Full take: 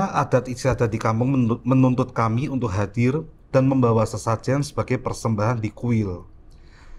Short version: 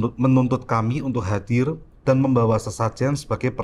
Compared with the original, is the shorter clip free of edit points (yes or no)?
yes